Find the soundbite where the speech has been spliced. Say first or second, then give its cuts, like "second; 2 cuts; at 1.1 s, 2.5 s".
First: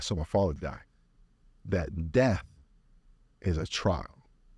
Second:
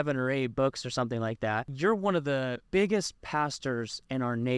second; 2 cuts; at 1.7 s, 2.6 s